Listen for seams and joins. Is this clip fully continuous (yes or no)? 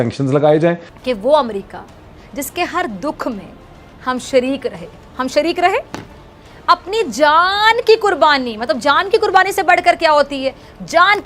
no